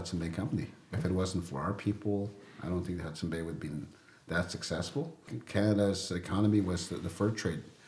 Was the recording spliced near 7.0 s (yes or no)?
no